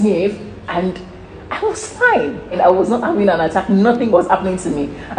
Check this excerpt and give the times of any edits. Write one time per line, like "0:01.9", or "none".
0:02.6
0:04.1